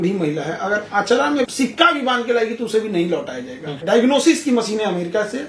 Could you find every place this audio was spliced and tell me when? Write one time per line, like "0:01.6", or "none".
0:01.5
0:03.8